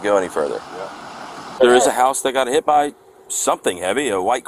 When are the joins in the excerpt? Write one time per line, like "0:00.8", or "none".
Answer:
0:01.5